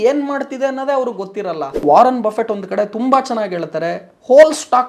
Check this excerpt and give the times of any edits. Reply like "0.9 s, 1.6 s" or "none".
1.8 s